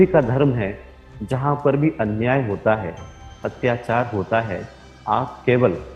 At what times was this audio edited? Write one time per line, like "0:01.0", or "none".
none